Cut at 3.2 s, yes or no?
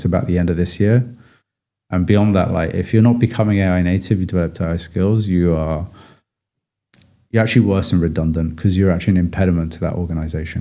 no